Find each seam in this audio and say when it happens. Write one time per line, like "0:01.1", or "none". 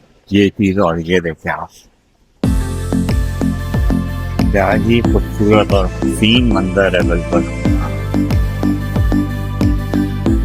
none